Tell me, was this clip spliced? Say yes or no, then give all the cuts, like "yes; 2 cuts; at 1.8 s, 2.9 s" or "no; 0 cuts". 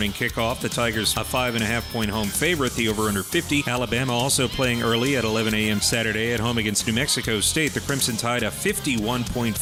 no; 0 cuts